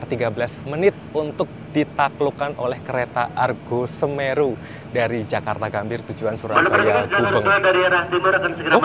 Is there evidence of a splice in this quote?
no; 0 cuts

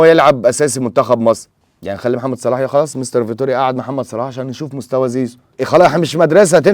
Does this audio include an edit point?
yes; 2 cuts; at 1.5 s, 5.6 s

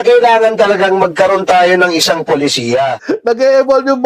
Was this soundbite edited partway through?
yes; 1 cut; at 3.0 s

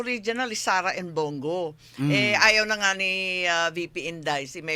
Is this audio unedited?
yes; 0 cuts

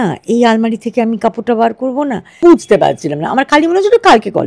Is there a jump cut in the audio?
yes; 1 cut; at 2.4 s

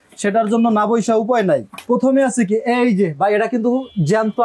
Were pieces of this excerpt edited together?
yes; 1 cut; at 1.7 s

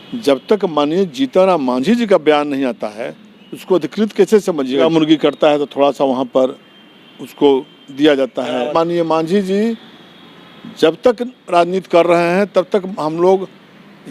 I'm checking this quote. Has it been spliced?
yes; 2 cuts; at 4.8 s, 8.7 s

